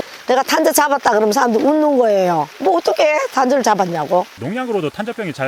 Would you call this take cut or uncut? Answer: uncut